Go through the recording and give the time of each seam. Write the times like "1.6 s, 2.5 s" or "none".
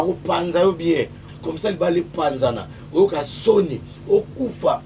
1.2 s

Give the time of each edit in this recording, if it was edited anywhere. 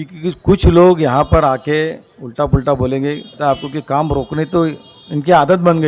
3.4 s

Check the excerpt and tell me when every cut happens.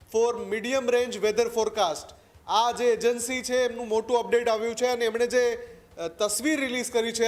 none

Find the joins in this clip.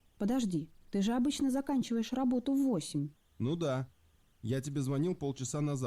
3.2 s

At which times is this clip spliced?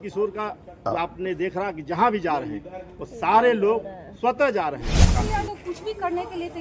5.2 s

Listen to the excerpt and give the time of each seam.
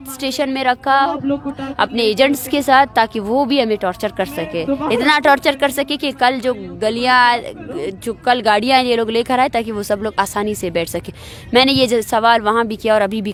none

